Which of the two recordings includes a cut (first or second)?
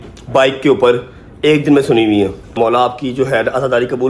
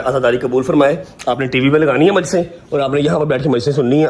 first